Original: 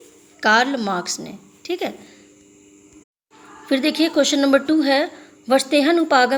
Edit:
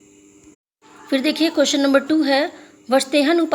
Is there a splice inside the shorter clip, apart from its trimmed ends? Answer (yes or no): yes